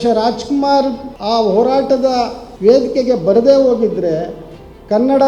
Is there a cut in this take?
yes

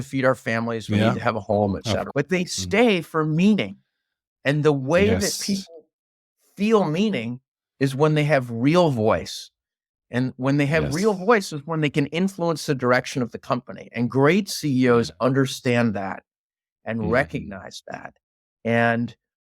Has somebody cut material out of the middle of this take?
yes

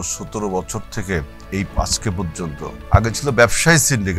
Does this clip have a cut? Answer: yes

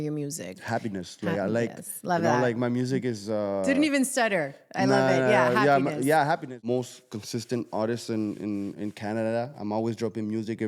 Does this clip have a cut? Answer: yes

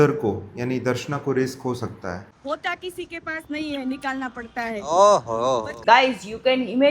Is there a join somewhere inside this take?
yes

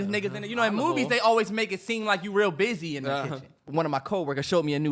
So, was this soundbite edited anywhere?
yes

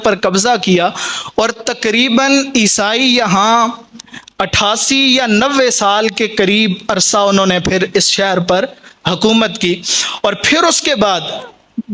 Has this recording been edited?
no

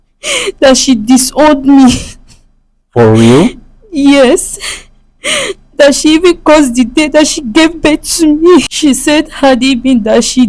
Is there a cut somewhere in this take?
yes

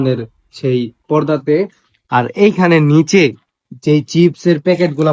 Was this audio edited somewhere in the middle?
no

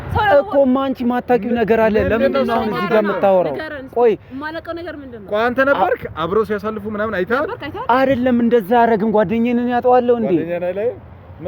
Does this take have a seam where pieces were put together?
no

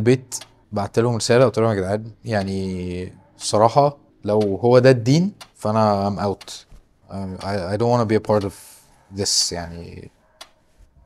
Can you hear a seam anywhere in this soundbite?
no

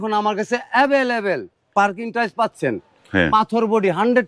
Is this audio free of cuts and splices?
yes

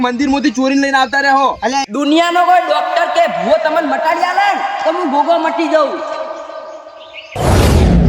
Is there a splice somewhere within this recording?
yes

